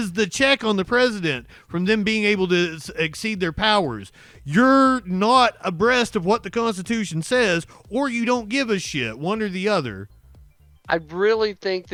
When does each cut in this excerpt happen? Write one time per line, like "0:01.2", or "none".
none